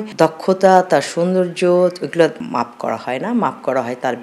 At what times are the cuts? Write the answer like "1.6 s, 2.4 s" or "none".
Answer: none